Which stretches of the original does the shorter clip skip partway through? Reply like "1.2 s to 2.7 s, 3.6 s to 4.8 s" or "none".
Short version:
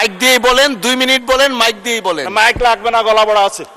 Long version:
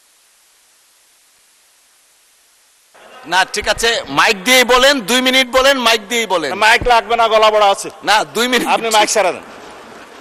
none